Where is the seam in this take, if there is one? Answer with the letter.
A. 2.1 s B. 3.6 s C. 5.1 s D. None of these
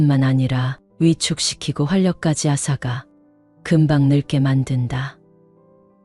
C